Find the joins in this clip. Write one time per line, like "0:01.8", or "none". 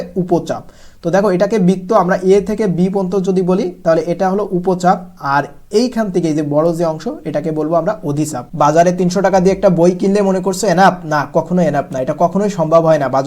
0:08.4

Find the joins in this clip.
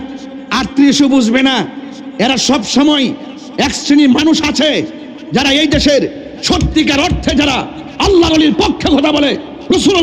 none

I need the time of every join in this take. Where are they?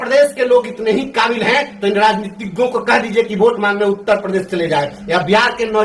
none

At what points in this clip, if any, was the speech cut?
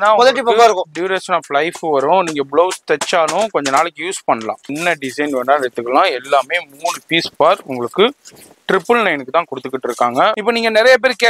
0:04.7
0:10.4

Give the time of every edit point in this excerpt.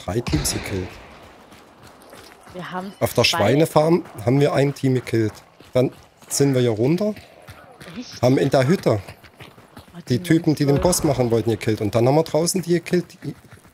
none

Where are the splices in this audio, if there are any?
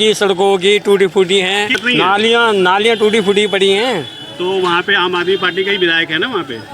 0:01.8

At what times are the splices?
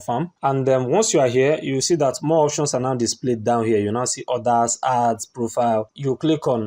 none

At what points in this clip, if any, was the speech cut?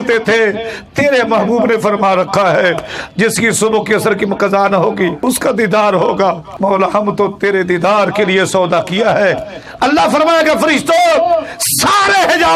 0:05.2
0:06.5

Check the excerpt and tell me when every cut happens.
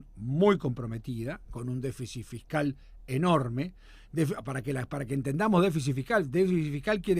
none

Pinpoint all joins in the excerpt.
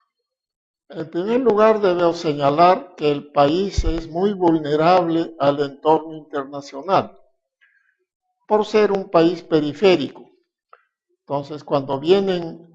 0:06.5

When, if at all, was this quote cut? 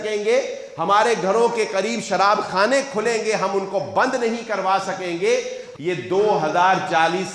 0:05.6

